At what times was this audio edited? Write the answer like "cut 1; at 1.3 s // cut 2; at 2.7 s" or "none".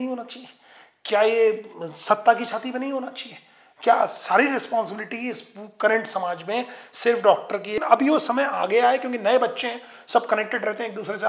cut 1; at 7.8 s